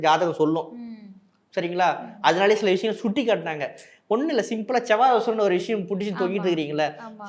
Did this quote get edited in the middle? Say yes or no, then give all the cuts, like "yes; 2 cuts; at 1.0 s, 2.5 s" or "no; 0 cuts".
no; 0 cuts